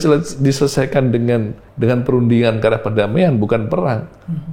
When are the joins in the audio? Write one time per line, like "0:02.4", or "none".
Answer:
0:01.6